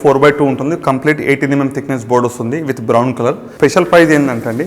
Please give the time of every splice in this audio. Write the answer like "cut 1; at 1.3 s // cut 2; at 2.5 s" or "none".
cut 1; at 3.5 s

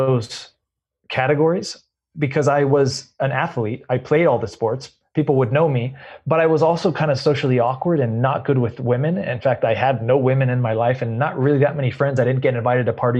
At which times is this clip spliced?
none

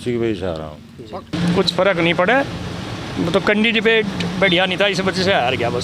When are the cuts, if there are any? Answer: cut 1; at 1.3 s

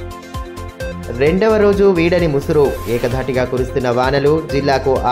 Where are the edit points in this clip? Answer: cut 1; at 0.9 s

